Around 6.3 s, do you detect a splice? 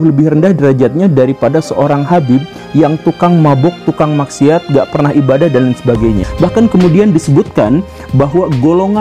yes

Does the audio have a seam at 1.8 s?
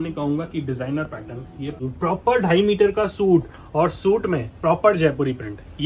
yes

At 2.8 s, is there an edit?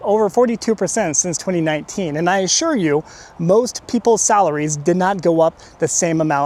no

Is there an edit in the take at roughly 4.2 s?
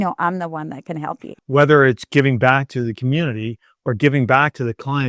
no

